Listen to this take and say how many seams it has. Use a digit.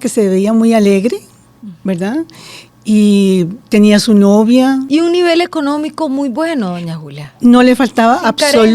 1